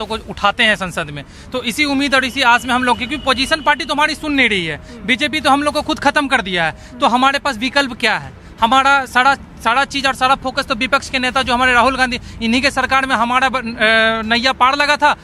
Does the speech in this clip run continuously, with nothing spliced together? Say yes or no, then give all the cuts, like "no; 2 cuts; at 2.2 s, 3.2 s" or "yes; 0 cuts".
yes; 0 cuts